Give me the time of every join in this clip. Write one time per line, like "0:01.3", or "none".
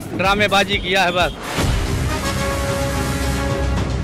0:01.4